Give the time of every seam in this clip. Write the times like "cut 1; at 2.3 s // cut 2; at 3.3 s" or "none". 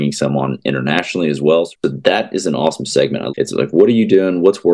cut 1; at 1.7 s // cut 2; at 3.3 s